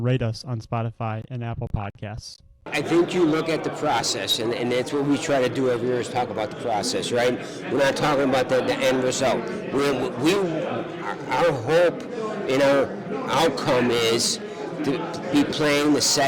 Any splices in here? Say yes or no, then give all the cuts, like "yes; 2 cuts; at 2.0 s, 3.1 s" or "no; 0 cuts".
yes; 1 cut; at 2.7 s